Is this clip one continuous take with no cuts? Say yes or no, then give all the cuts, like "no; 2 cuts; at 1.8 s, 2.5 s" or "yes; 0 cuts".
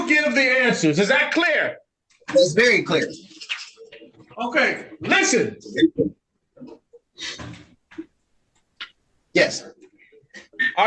yes; 0 cuts